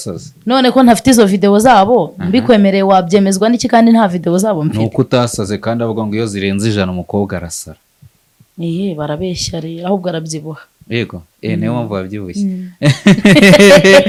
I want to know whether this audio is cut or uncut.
uncut